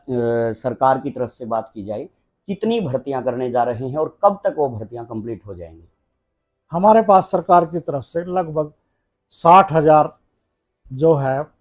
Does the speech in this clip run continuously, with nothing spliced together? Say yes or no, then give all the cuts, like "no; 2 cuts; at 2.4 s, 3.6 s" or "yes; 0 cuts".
yes; 0 cuts